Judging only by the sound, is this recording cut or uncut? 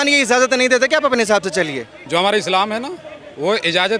cut